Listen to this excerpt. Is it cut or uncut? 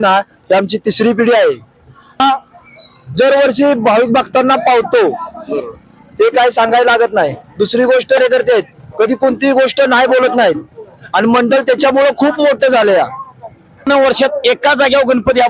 cut